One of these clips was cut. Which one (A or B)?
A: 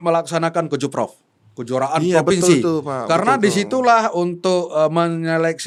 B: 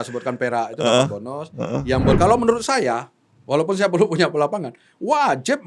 B